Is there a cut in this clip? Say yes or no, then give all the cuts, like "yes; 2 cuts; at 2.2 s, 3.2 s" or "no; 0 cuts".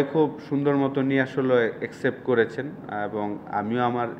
no; 0 cuts